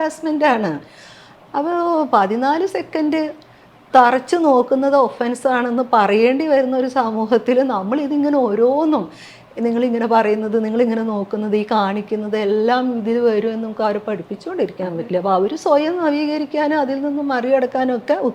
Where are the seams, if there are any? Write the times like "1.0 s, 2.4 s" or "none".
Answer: none

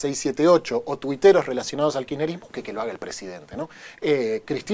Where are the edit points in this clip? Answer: none

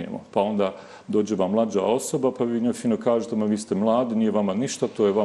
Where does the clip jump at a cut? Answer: none

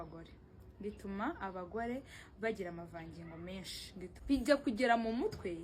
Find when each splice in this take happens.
4.1 s

